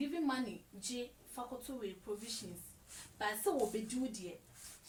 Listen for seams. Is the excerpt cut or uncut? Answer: uncut